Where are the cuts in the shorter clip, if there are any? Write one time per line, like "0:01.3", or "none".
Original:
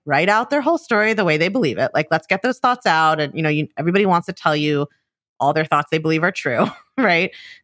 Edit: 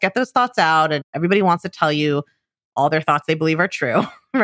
0:01.1